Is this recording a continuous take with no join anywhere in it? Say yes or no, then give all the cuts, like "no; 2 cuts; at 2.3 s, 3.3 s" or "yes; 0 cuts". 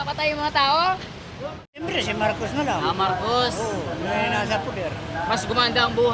no; 1 cut; at 1.8 s